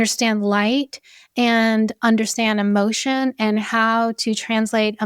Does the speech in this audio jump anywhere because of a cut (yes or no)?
no